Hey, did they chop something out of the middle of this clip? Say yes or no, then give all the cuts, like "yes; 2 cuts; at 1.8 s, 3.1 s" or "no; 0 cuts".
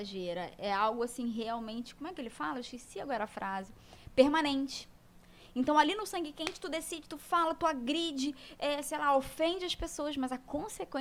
no; 0 cuts